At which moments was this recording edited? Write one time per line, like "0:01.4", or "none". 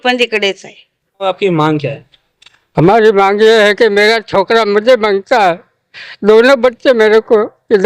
0:01.3

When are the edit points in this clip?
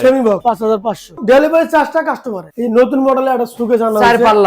0:01.0
0:02.5

